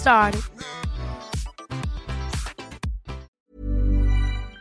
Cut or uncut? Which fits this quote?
cut